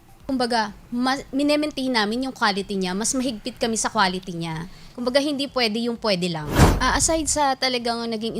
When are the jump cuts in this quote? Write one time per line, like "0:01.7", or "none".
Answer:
0:06.7